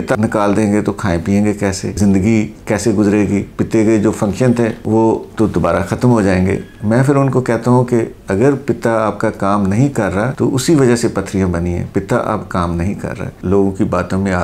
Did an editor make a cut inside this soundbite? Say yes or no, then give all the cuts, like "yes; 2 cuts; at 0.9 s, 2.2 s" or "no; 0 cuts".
yes; 1 cut; at 13.4 s